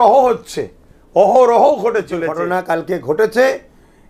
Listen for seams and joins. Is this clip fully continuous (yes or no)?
no